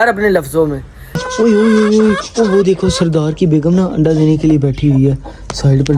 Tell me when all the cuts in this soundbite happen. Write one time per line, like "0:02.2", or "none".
0:01.1